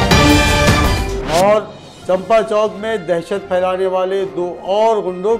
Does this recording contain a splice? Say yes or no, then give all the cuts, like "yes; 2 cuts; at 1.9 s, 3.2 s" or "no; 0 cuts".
yes; 1 cut; at 1.1 s